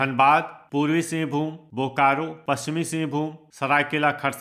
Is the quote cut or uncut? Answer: cut